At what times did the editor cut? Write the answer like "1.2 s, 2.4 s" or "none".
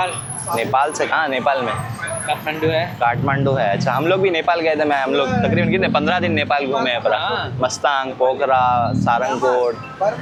none